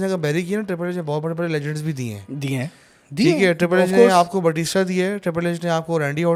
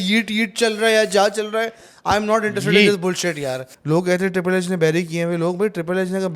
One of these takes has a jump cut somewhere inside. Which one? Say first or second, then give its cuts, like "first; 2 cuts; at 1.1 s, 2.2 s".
second; 1 cut; at 3.7 s